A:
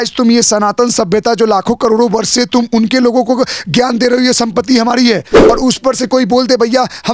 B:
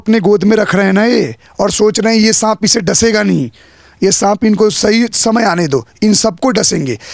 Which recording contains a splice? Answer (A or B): A